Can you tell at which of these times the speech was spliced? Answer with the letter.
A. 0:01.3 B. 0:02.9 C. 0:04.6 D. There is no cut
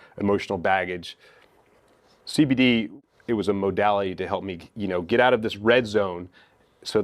B